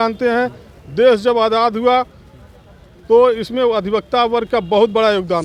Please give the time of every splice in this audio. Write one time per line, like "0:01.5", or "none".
none

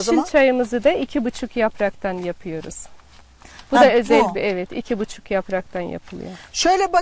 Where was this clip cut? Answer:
none

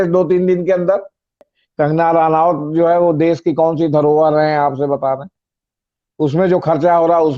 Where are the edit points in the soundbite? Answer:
0:01.6

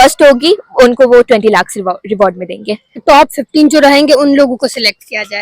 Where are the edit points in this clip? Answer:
0:03.0

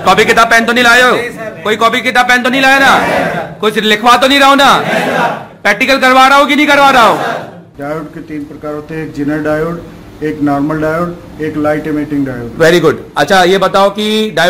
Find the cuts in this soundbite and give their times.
0:07.6

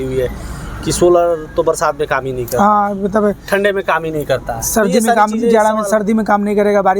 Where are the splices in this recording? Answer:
none

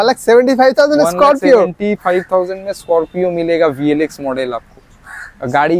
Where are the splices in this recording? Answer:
none

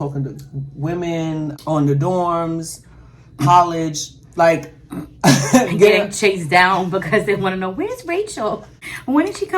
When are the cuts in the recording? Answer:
0:01.5
0:08.7

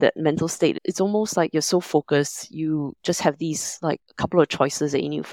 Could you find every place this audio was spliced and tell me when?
0:04.1

